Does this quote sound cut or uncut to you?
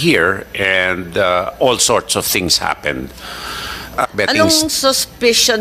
cut